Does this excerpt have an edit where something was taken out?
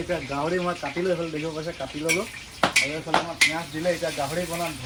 no; 0 cuts

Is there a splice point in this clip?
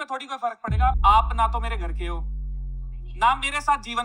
yes; 1 cut; at 1.0 s

